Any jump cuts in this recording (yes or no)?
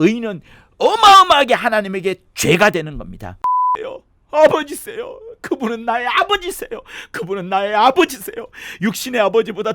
yes